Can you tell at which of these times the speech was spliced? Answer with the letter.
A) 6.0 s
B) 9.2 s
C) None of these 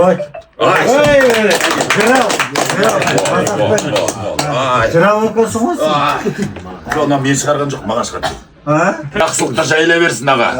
B